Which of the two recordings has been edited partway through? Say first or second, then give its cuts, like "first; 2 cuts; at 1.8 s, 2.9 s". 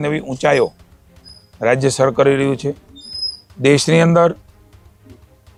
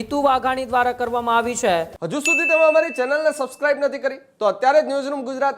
second; 1 cut; at 2.0 s